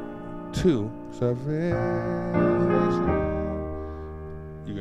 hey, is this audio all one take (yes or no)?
yes